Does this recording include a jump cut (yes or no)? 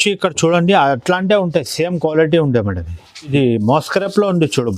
yes